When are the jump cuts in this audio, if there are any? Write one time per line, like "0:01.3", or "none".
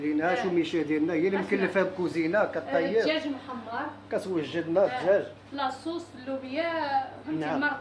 none